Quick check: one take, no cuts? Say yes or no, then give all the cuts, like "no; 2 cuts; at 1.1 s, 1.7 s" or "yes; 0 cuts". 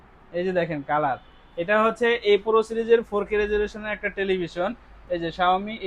yes; 0 cuts